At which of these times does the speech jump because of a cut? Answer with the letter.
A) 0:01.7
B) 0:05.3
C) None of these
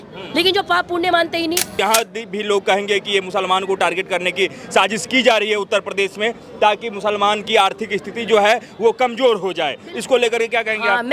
A